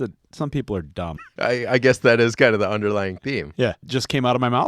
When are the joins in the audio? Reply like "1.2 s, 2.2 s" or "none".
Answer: 1.2 s, 3.8 s